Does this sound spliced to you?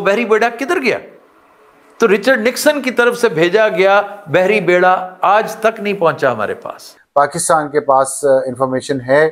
yes; 1 cut; at 6.9 s

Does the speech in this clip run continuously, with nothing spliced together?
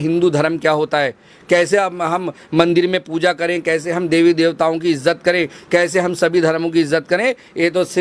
yes; 0 cuts

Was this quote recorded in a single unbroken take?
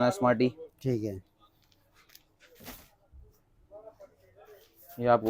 no; 1 cut; at 2.5 s

